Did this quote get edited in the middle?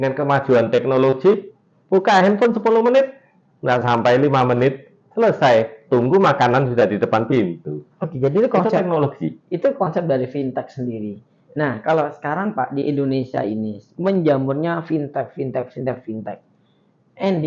no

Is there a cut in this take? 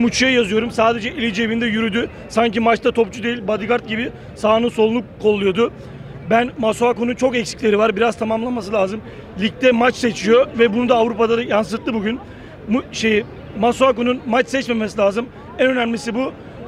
no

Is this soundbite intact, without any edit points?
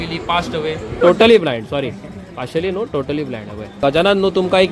no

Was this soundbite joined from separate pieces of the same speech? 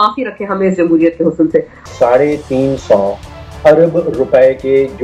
yes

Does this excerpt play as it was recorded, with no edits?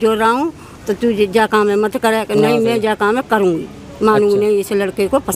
yes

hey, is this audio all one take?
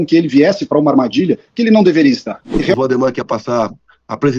no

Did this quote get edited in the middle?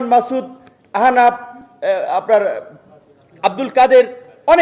no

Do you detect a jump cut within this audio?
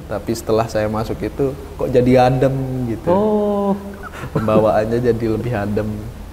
no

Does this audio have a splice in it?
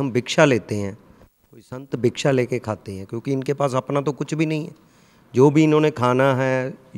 no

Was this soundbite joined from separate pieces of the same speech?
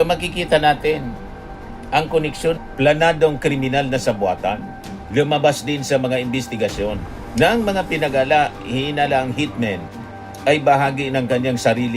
yes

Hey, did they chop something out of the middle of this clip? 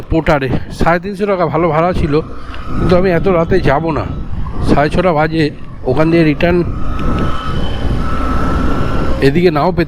no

